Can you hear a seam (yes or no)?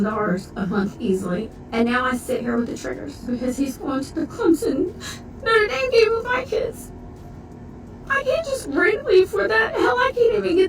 yes